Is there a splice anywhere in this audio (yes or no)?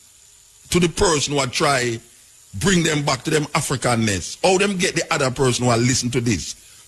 no